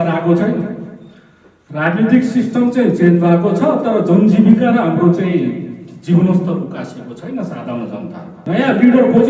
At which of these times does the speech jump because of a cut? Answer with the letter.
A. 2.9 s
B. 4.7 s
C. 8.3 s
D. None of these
C